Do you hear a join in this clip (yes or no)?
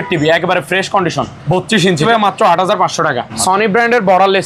yes